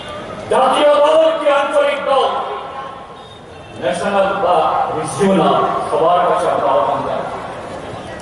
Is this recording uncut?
yes; 0 cuts

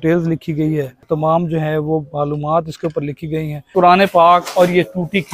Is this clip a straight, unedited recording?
no; 2 cuts; at 1.0 s, 3.7 s

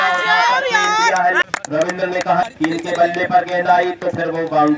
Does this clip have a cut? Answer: yes; 1 cut; at 1.4 s

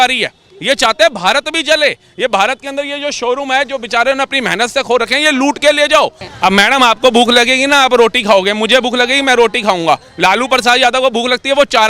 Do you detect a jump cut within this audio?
yes; 1 cut; at 6.2 s

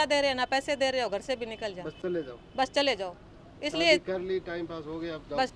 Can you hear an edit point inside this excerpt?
no; 0 cuts

